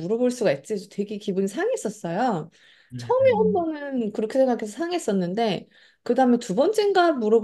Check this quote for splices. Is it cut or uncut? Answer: uncut